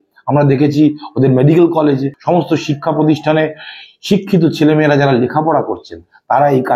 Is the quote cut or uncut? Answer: cut